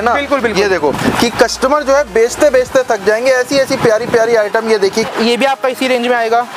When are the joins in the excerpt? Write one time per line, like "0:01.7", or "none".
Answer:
0:05.1